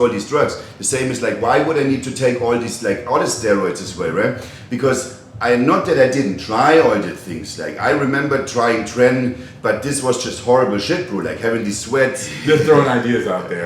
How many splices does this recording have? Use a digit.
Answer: 1